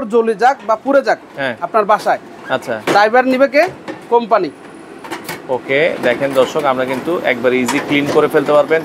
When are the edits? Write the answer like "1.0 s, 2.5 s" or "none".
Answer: none